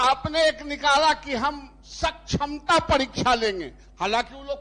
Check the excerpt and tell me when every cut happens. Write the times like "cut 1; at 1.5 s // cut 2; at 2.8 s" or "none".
none